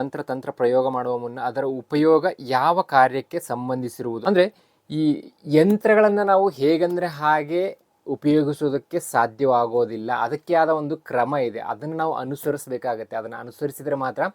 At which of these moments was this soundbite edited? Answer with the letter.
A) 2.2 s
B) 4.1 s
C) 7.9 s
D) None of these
B